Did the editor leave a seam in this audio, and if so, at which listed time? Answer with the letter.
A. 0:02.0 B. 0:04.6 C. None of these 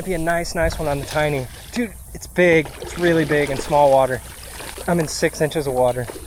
C